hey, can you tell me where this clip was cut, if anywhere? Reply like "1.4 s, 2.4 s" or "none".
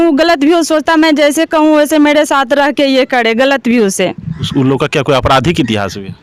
none